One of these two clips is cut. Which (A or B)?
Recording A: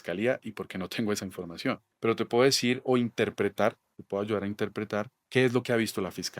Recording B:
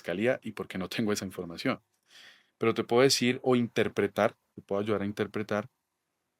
A